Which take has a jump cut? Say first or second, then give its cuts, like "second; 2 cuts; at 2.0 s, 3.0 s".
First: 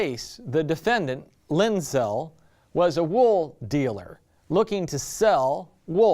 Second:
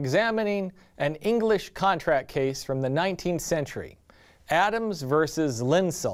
first; 1 cut; at 2.7 s